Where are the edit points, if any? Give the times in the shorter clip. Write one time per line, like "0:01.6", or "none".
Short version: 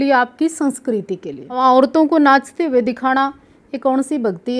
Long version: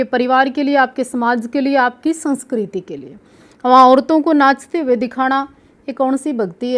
0:01.6